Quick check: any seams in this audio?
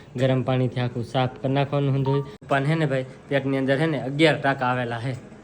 yes; 1 cut; at 2.3 s

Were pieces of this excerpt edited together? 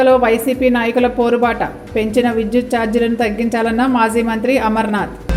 no; 0 cuts

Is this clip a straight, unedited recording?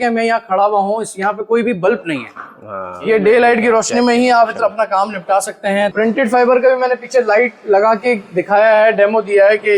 no; 2 cuts; at 3.0 s, 5.9 s

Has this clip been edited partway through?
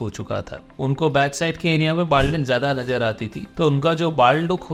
no; 0 cuts

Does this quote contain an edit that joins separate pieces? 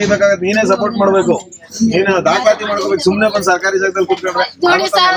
no; 0 cuts

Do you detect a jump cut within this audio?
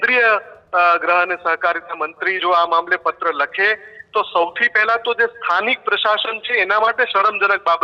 no; 0 cuts

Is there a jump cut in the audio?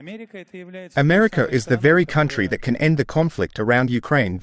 yes; 1 cut; at 0.9 s

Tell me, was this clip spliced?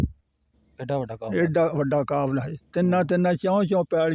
no; 0 cuts

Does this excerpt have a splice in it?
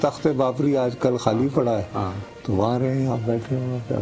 no; 0 cuts

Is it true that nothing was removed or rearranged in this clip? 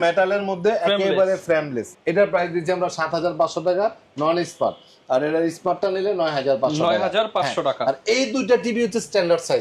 yes; 0 cuts

